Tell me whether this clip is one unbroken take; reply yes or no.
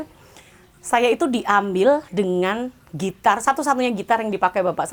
yes